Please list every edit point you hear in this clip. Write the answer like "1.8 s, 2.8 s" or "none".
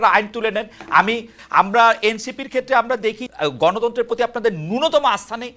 1.3 s, 3.2 s